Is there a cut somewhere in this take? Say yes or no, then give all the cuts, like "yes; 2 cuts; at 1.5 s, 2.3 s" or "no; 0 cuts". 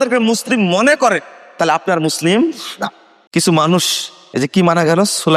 no; 0 cuts